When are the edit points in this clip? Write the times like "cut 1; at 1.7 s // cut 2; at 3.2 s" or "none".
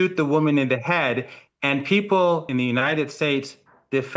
cut 1; at 2.5 s